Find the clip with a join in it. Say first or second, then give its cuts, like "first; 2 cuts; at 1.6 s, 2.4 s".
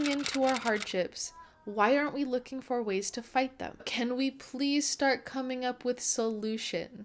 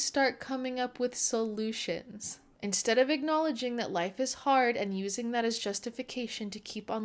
first; 1 cut; at 3.9 s